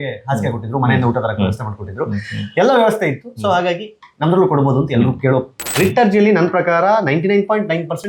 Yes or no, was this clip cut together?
yes